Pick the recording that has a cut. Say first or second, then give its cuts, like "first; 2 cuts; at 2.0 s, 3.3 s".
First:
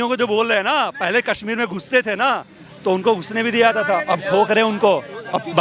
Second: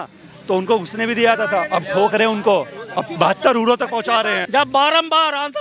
second; 1 cut; at 4.4 s